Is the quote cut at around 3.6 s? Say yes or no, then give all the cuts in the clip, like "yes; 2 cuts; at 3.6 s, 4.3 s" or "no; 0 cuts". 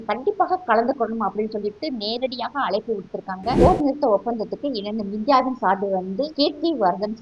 yes; 2 cuts; at 3.6 s, 6.3 s